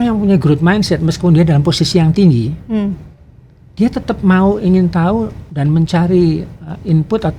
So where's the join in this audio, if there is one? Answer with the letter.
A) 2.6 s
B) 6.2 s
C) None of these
C